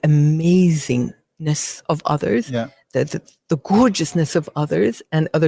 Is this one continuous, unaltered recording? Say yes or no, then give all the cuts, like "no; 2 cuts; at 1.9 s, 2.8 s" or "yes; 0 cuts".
yes; 0 cuts